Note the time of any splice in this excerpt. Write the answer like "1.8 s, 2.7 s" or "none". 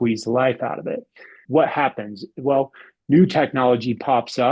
1.4 s